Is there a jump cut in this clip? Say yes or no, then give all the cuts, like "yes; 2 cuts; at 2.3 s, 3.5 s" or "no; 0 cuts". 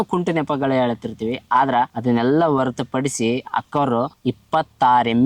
no; 0 cuts